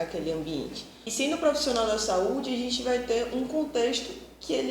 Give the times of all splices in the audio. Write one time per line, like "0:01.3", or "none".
0:01.1

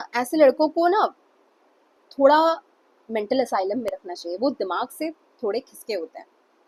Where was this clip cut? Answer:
none

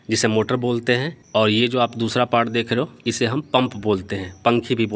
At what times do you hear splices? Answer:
0:01.2
0:03.5

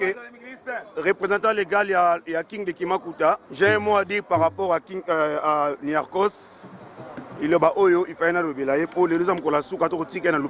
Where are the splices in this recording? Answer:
0:03.5

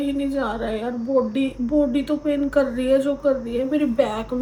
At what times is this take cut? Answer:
none

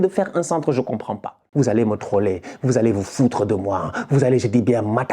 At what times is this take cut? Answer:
0:01.4

